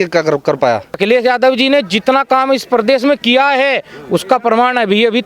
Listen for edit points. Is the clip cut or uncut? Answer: cut